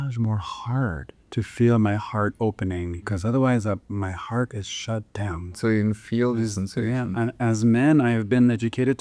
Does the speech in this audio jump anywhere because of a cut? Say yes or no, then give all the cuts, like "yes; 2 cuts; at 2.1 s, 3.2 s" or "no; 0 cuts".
yes; 3 cuts; at 1.1 s, 3.0 s, 5.5 s